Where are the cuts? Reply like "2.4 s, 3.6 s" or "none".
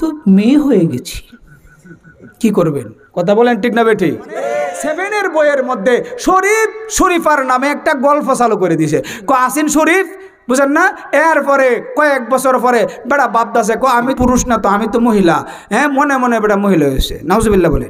4.8 s, 14.1 s

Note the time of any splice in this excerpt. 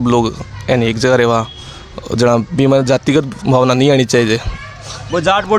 none

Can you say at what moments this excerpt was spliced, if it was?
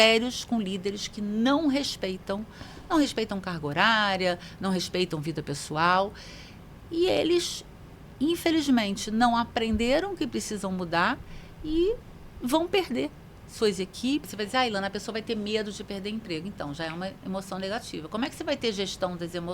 14.3 s

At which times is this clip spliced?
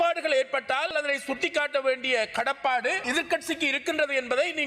0.9 s, 3.0 s

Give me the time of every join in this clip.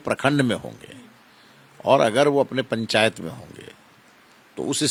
none

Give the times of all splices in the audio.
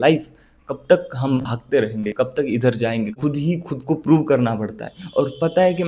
3.2 s

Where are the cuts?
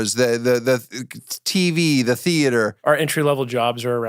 2.8 s

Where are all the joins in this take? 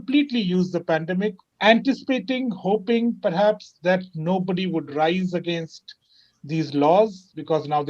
1.5 s

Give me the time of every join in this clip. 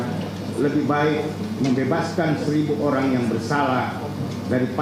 none

